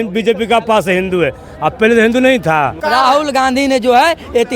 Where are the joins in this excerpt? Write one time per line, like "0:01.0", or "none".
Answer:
0:02.8